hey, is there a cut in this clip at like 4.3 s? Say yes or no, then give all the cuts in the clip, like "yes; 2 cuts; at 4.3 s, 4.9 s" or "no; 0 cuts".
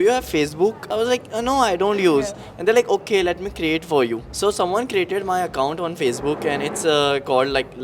yes; 2 cuts; at 0.9 s, 4.3 s